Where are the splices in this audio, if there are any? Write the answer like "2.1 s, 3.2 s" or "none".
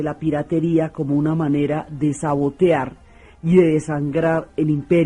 3.4 s